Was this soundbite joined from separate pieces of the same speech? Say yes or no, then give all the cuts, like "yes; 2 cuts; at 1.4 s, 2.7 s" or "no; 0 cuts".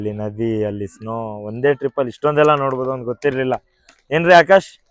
no; 0 cuts